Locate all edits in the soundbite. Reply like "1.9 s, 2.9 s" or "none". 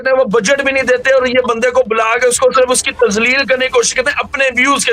none

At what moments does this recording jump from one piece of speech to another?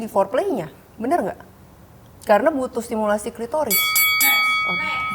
4.1 s

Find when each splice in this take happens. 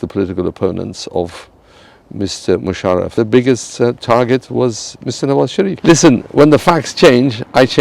3.1 s, 5.8 s

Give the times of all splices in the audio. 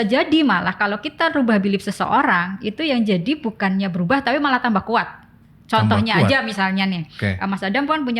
none

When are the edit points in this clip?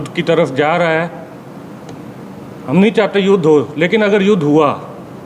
none

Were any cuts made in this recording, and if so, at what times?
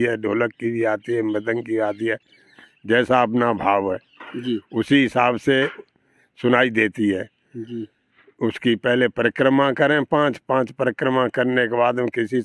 none

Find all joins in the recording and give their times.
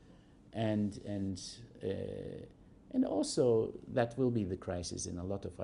2.4 s

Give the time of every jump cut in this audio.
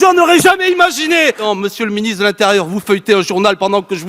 1.4 s

